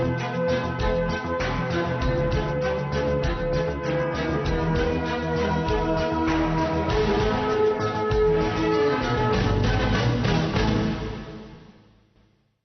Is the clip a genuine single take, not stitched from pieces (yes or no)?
no